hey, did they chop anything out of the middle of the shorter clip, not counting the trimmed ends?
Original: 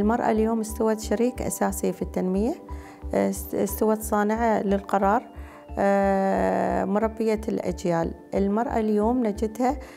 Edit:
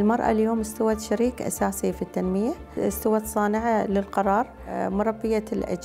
yes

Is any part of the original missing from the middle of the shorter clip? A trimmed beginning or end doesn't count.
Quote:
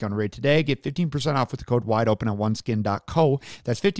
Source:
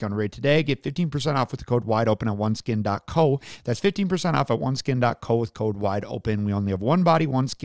no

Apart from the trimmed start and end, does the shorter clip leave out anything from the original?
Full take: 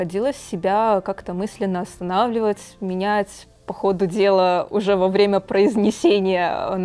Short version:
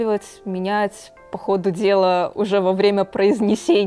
no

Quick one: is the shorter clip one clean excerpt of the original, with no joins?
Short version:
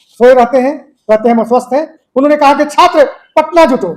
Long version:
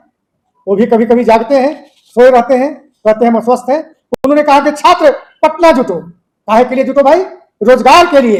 no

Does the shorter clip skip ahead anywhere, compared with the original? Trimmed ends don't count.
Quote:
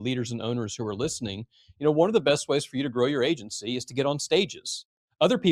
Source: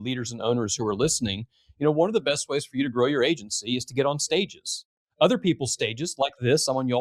no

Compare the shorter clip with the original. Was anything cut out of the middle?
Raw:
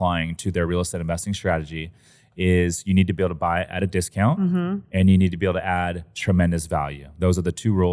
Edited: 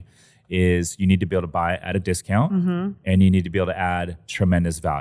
no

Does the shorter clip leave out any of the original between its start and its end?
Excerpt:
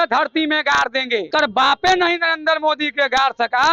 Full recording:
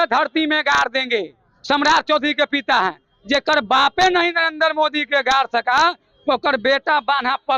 yes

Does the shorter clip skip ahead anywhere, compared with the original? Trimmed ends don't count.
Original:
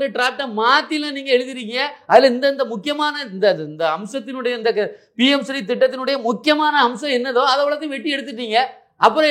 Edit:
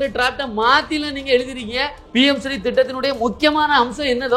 yes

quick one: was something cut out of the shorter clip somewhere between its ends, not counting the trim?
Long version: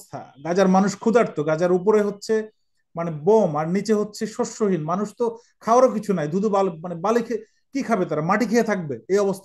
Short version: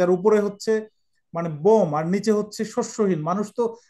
no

